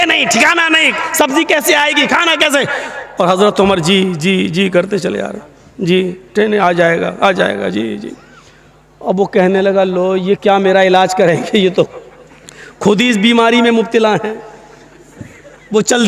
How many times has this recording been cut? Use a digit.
0